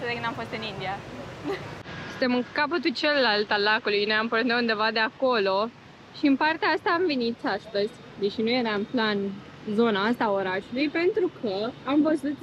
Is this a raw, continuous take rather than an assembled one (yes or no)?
yes